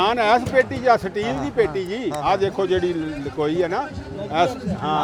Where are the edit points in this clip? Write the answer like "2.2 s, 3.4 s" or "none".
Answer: none